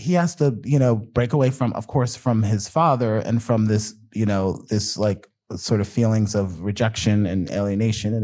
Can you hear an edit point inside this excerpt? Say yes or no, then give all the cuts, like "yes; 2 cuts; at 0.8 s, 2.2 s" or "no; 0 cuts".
no; 0 cuts